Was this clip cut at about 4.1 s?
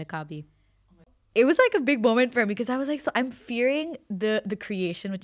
no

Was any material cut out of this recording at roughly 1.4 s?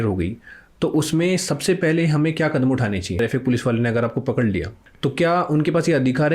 no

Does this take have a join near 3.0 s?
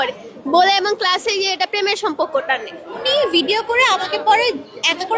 yes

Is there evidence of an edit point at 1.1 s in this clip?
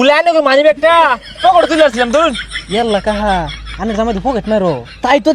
no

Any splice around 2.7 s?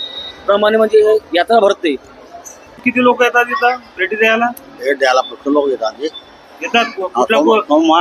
yes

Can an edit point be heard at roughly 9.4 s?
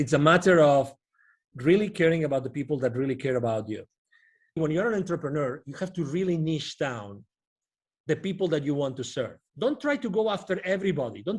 yes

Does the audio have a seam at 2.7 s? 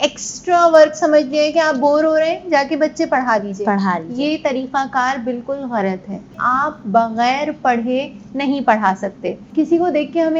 no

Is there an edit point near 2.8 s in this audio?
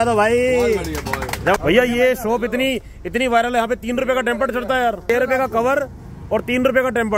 no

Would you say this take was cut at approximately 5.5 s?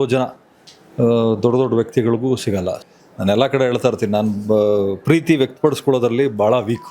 no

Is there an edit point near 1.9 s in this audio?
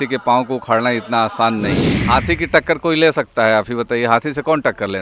yes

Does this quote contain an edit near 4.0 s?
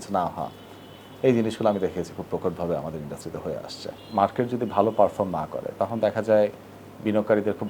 yes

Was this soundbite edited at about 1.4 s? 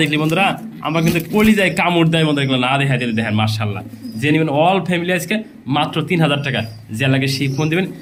no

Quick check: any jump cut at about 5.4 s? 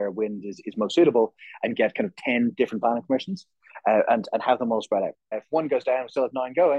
yes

